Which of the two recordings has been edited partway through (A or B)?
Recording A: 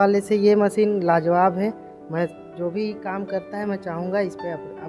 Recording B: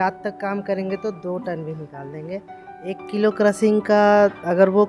B